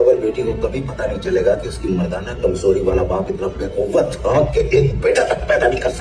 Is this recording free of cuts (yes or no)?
yes